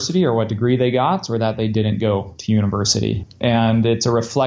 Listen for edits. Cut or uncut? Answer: cut